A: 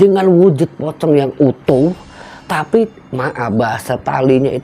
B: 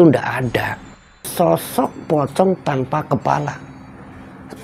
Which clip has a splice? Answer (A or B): B